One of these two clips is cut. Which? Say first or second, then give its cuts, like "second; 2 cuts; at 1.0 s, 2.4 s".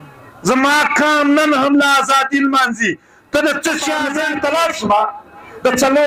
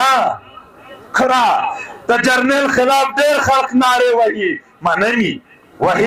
first; 1 cut; at 4.0 s